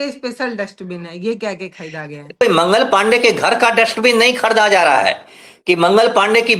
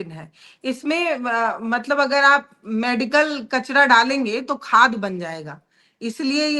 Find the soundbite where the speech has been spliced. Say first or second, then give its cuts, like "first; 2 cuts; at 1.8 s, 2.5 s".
first; 1 cut; at 2.4 s